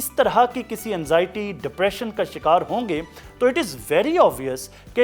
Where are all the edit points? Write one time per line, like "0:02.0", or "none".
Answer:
none